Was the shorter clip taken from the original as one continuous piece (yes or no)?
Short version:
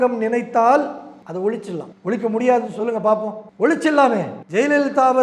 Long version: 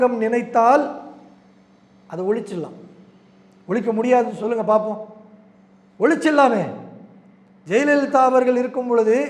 no